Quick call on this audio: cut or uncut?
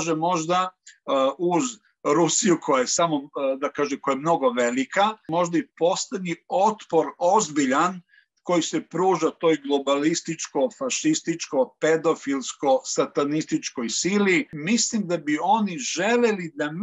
cut